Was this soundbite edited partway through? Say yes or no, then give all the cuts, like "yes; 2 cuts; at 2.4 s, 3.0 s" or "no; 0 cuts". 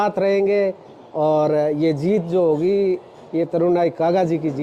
no; 0 cuts